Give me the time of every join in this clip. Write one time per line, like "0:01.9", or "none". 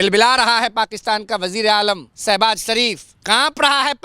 0:02.1
0:03.1

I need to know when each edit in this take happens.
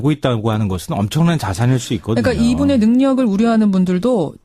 0:03.1

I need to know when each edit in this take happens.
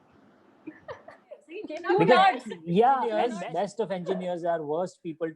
0:01.6
0:03.3

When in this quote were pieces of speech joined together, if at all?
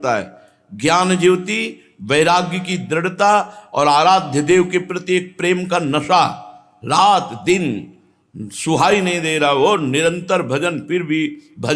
none

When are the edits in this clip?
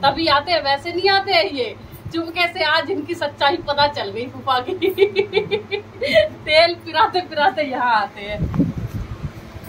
none

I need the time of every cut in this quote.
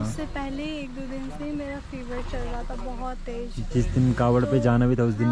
none

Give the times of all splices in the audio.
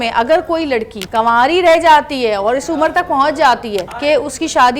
0:01.0
0:03.8

